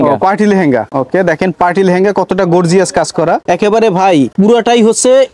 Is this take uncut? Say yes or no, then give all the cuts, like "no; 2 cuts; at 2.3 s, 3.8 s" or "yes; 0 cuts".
no; 3 cuts; at 0.9 s, 3.4 s, 4.3 s